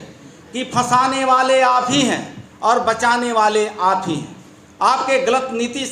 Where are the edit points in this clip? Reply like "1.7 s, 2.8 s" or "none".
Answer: none